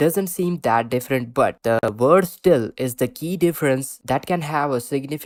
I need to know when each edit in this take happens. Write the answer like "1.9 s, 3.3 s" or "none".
none